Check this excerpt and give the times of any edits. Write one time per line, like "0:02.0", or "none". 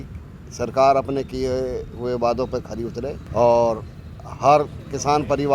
0:03.2